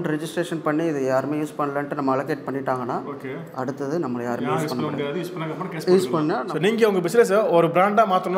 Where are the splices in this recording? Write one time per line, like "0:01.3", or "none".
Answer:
0:06.4